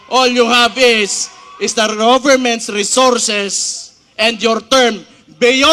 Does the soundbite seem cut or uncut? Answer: uncut